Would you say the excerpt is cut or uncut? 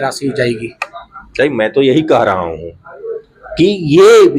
uncut